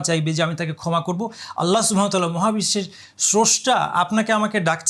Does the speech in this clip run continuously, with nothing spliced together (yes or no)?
yes